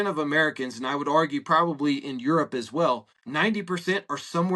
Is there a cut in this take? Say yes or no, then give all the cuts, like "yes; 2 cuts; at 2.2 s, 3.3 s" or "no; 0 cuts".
yes; 1 cut; at 3.2 s